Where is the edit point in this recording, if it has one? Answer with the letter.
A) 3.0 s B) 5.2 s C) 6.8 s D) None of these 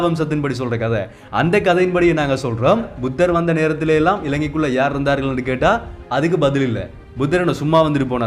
A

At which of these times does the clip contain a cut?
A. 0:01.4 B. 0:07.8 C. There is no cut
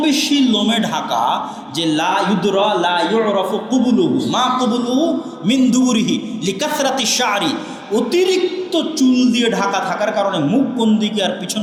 C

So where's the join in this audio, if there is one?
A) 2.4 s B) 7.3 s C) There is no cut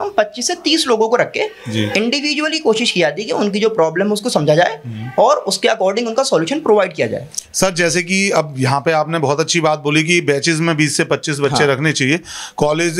C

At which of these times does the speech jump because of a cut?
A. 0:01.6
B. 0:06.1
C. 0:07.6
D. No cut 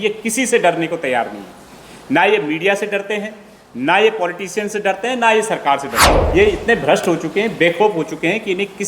B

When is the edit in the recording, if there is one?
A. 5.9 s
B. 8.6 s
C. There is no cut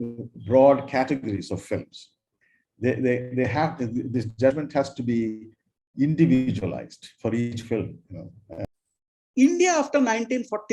B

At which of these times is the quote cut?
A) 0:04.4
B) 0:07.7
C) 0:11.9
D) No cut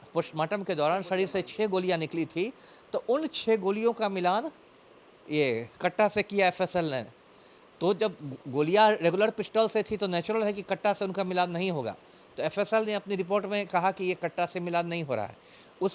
D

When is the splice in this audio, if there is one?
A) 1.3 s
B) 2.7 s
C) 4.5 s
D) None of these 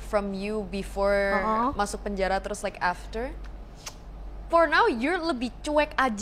C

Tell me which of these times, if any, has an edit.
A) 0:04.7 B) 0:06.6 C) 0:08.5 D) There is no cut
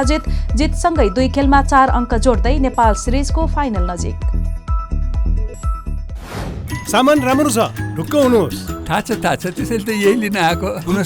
B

